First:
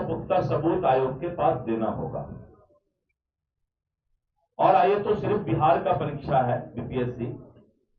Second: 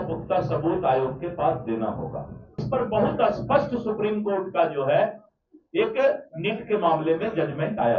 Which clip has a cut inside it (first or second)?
second